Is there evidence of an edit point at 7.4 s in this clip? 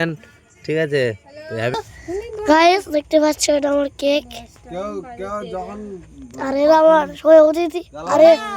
no; 1 cut; at 1.7 s

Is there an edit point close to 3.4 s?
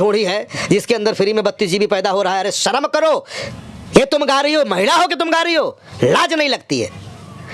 no; 0 cuts

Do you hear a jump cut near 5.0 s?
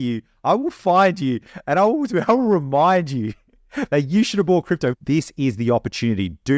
yes; 1 cut; at 5.0 s

